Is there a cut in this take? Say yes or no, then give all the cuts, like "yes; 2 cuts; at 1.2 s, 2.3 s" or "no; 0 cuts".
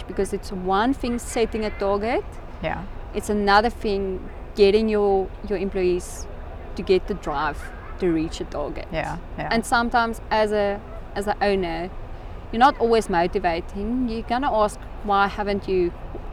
no; 0 cuts